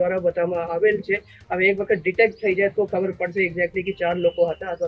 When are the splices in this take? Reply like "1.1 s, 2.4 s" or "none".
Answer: none